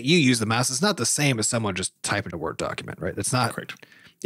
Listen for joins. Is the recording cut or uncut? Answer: cut